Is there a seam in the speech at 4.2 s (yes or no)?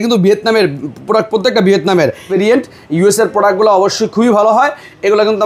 no